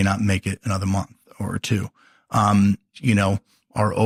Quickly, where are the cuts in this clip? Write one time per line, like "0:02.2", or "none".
none